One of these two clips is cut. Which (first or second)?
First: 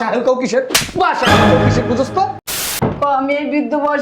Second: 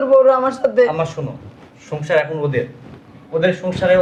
first